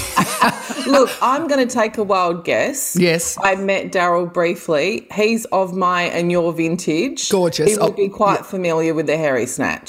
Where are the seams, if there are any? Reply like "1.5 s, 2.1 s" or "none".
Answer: none